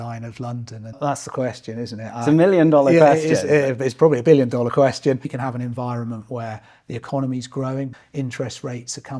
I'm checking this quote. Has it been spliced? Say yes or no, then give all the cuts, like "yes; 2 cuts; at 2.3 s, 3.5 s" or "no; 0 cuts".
yes; 3 cuts; at 1.0 s, 5.4 s, 7.9 s